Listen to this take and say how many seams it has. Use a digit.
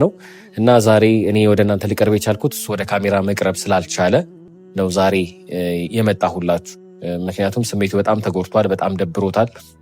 1